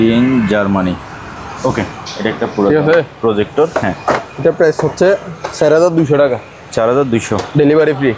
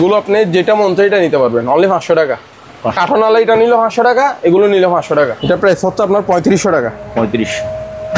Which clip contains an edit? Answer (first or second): second